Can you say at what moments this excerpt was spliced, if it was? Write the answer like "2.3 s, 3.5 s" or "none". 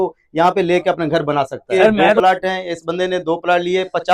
2.2 s